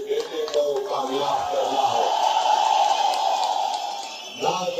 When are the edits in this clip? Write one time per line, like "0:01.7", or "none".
none